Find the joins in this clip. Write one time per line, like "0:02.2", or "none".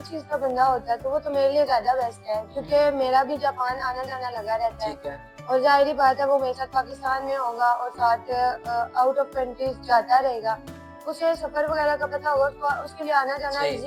none